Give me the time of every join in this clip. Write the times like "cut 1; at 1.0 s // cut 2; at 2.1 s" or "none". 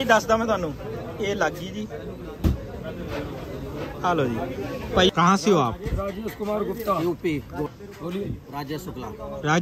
cut 1; at 5.1 s // cut 2; at 7.7 s